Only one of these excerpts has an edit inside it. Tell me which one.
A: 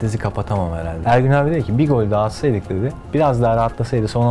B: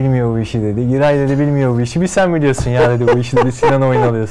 A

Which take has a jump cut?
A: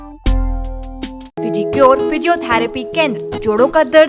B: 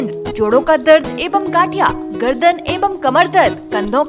A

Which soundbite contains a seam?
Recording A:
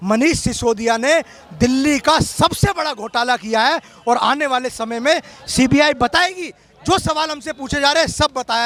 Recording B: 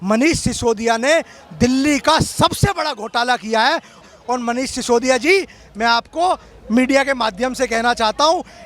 B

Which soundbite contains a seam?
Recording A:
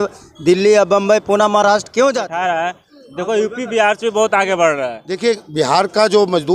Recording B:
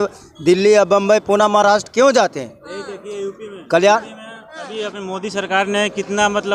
A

